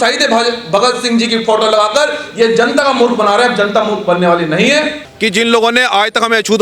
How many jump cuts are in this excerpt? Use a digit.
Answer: 1